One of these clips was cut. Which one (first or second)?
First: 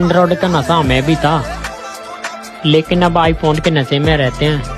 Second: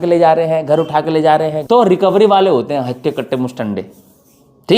second